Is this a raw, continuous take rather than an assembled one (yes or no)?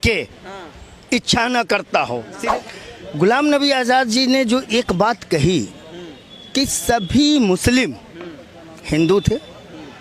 no